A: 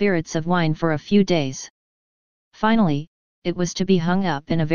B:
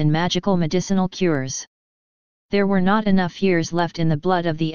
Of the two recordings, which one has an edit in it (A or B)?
A